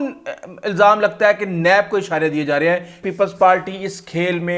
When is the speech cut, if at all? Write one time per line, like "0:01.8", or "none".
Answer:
0:03.0